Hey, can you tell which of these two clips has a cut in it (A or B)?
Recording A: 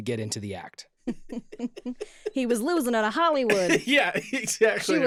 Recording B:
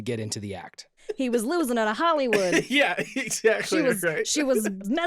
B